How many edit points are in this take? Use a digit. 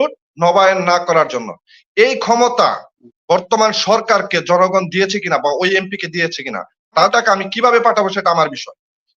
1